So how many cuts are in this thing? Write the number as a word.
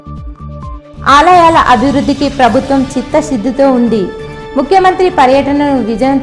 zero